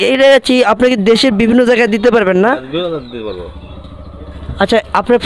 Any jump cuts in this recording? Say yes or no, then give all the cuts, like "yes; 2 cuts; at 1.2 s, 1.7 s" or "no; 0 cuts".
no; 0 cuts